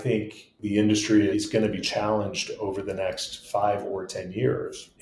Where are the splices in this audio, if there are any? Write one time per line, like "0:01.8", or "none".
0:01.3

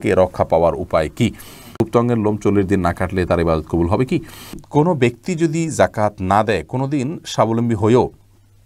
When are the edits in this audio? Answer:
0:01.7
0:04.6

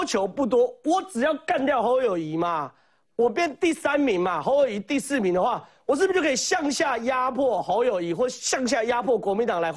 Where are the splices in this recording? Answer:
none

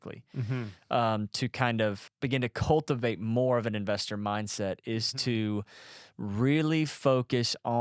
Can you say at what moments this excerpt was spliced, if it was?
0:02.1

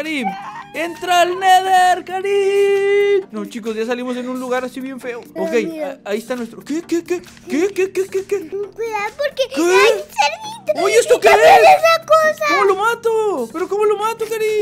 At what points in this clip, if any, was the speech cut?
0:03.2
0:05.2
0:08.5

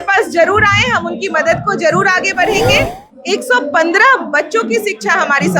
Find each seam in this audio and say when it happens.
0:03.1

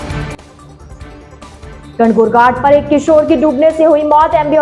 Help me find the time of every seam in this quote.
0:01.9

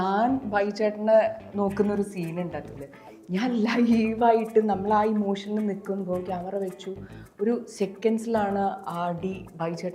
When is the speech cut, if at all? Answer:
none

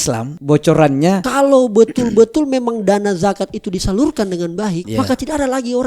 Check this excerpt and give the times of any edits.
0:01.2

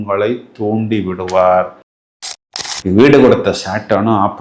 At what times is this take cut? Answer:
0:02.1

